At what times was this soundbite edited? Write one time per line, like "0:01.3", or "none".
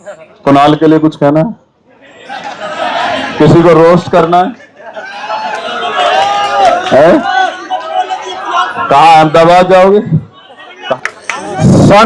0:10.9